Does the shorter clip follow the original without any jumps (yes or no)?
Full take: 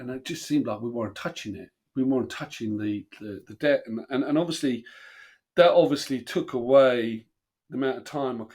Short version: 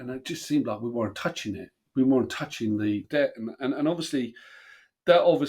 no